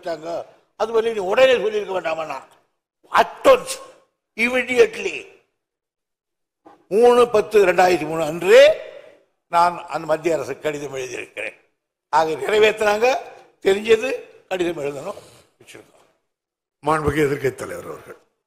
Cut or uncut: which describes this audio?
uncut